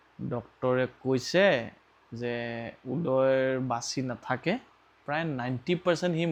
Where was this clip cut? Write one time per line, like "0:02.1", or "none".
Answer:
none